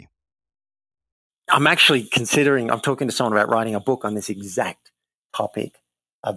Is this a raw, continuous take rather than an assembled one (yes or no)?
no